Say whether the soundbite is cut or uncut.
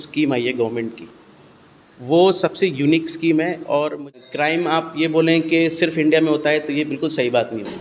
cut